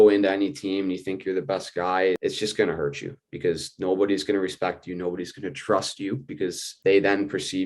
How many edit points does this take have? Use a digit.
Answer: 1